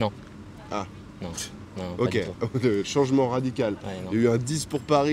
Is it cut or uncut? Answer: uncut